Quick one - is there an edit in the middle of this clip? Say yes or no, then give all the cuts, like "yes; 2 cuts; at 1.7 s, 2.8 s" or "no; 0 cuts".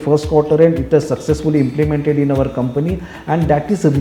no; 0 cuts